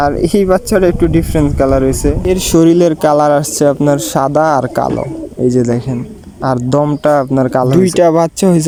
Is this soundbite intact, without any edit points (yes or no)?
yes